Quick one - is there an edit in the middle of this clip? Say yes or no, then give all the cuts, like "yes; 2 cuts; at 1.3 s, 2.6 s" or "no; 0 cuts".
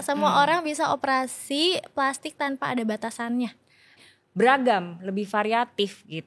yes; 1 cut; at 4.0 s